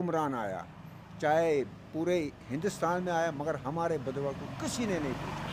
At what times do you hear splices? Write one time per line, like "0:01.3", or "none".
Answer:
none